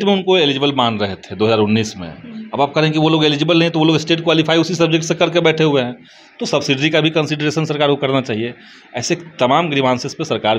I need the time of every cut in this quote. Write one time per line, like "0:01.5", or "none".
none